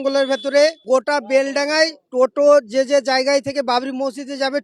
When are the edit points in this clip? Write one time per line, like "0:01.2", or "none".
0:00.8
0:02.0